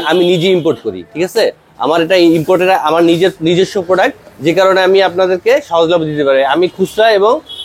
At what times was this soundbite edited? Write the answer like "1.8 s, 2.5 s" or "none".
none